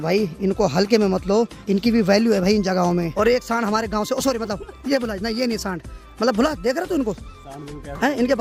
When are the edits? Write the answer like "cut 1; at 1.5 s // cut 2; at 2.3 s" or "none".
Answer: none